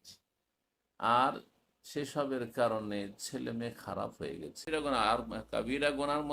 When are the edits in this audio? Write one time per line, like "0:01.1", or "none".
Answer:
0:04.7